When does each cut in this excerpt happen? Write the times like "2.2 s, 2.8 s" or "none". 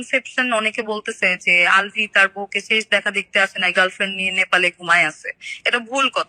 none